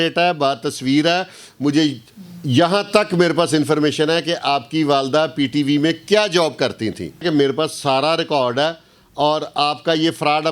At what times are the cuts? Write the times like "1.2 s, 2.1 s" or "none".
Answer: 7.2 s